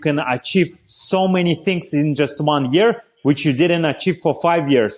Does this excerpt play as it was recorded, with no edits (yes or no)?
yes